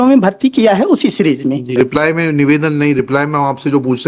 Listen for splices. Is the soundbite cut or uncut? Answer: cut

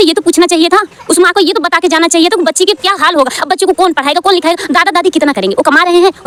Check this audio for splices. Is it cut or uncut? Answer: uncut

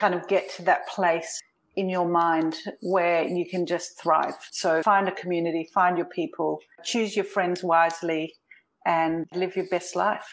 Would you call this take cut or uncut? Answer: cut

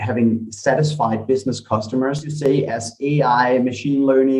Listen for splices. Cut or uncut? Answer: cut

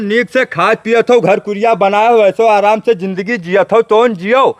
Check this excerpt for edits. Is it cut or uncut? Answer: uncut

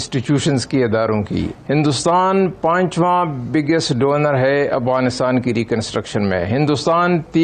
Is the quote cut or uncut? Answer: uncut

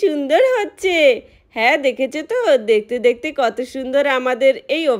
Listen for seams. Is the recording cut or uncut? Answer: uncut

